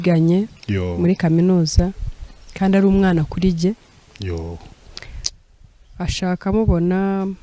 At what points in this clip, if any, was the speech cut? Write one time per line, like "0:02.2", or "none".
none